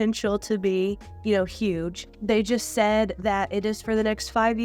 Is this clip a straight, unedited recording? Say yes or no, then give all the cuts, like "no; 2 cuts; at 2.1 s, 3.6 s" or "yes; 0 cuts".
no; 1 cut; at 2.1 s